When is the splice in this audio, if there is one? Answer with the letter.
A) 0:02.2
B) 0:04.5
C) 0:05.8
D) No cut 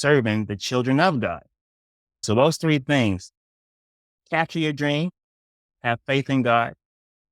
A